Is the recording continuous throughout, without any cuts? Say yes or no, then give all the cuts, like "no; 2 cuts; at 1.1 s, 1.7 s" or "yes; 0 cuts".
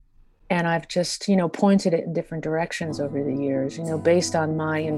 yes; 0 cuts